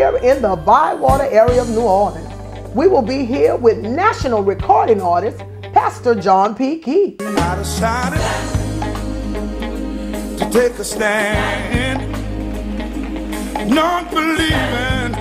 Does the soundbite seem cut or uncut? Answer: uncut